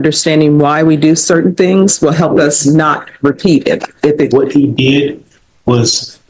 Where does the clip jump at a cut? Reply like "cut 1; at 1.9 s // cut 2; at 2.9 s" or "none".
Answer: cut 1; at 4.3 s